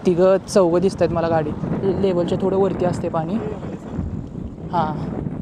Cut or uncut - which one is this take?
uncut